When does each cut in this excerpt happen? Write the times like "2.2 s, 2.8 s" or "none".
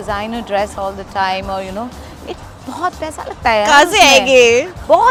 none